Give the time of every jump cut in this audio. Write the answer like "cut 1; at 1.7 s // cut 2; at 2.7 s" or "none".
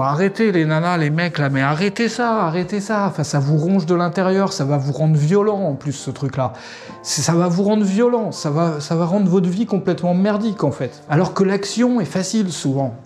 cut 1; at 10.9 s